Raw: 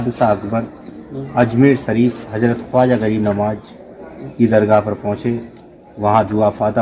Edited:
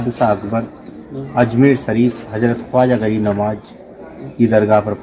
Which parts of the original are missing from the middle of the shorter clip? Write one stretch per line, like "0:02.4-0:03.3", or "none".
none